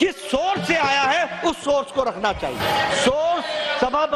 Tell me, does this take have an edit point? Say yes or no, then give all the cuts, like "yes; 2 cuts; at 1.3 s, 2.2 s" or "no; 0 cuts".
yes; 1 cut; at 2.6 s